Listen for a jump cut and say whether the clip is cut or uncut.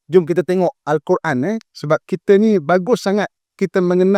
uncut